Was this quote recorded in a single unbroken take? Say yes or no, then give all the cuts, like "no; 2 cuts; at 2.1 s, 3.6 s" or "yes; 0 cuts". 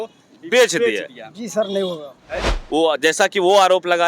no; 1 cut; at 2.5 s